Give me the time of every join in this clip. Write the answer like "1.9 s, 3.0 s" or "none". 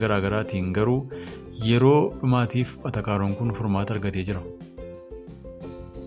4.4 s